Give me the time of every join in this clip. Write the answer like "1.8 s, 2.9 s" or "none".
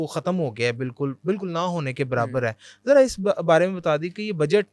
none

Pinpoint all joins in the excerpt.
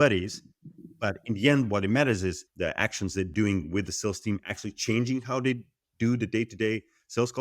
2.5 s

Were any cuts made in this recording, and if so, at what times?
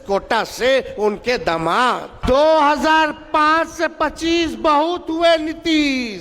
2.1 s

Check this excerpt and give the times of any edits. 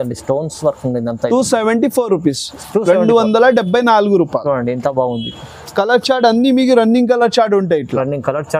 none

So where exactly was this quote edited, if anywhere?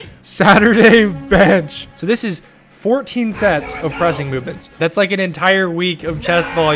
1.8 s, 4.8 s

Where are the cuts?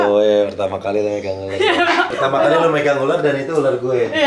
2.1 s

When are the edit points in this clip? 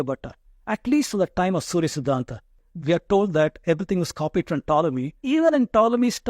2.6 s, 5.2 s

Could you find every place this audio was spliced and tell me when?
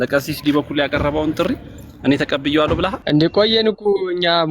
3.0 s

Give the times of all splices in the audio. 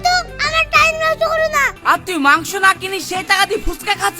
1.8 s

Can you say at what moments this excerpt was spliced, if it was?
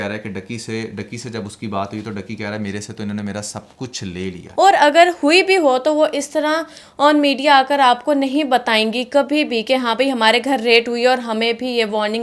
4.4 s

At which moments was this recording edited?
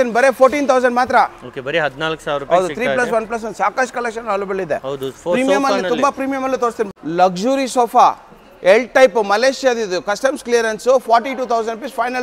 none

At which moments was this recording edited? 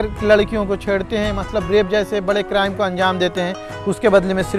none

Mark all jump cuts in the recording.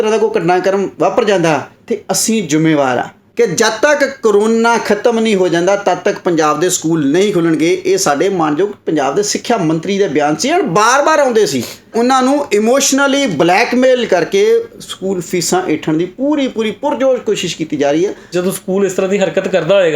3.2 s, 11.9 s, 18.3 s

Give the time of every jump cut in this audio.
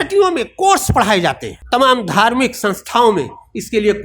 1.5 s

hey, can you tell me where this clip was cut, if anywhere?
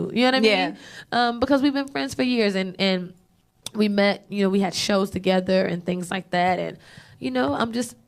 3.3 s

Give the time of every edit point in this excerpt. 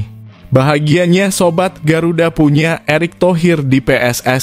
none

